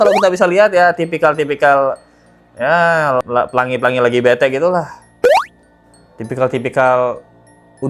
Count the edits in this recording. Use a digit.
0